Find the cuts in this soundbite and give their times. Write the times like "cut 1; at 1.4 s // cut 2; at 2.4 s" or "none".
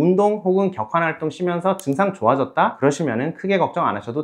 cut 1; at 2.8 s